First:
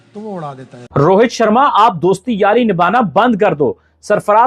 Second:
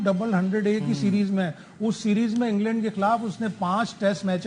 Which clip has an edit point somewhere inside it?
first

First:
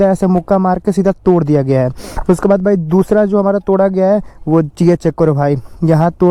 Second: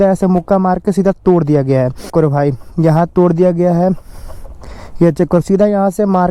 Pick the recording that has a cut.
second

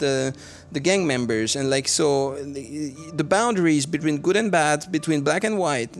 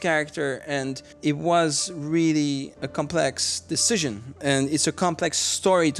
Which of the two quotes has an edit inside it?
second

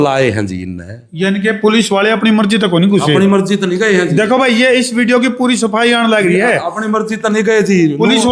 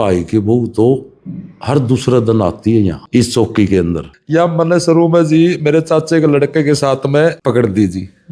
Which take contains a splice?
second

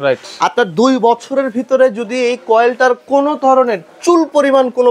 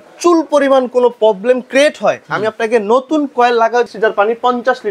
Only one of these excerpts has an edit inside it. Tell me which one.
second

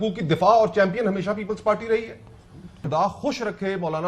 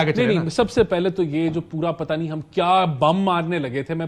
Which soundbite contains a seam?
first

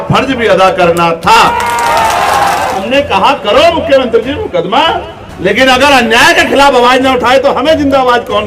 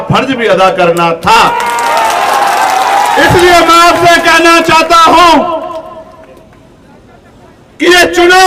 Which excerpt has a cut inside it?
first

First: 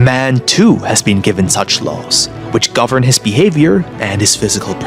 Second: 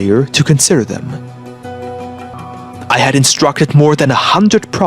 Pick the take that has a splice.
second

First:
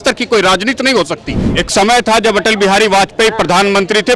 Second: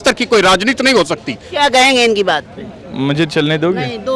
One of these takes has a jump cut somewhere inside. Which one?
first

